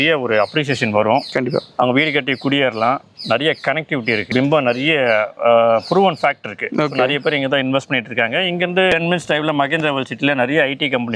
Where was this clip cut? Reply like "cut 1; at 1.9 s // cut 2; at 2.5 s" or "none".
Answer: none